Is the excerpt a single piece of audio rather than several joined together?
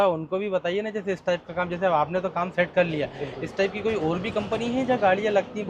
yes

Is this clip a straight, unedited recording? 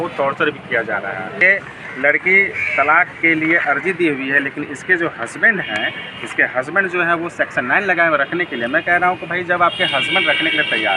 no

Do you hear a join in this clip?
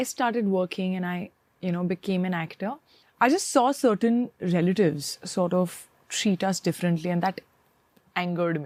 no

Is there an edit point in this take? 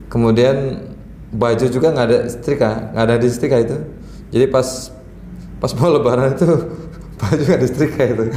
no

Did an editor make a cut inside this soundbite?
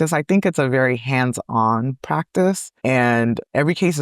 yes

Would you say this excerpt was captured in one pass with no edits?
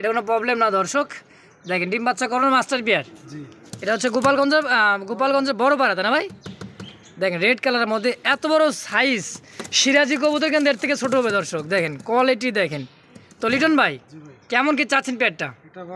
yes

